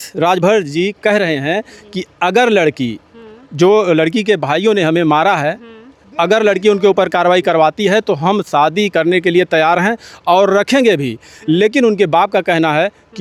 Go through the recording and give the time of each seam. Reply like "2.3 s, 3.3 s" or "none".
none